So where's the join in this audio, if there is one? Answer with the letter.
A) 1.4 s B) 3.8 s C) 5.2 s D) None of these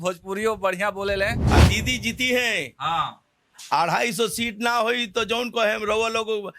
A